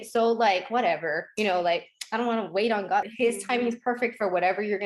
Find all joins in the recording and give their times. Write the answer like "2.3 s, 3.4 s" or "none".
3.0 s

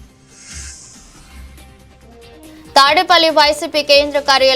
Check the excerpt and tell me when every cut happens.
2.5 s

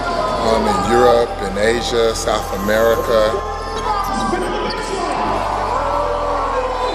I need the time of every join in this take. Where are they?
2.5 s, 6.1 s

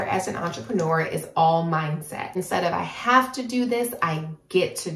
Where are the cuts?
2.4 s

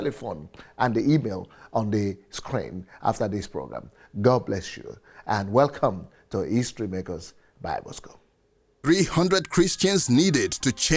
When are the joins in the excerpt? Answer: 8.9 s

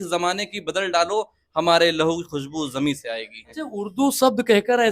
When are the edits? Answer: 3.5 s

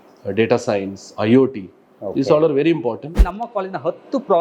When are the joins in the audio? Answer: 3.2 s

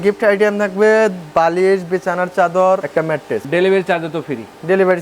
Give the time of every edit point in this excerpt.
3.3 s

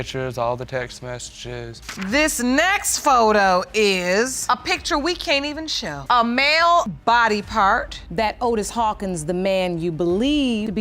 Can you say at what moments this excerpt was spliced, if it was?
1.6 s, 8.0 s

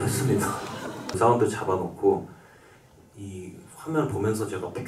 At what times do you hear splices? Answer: 1.2 s

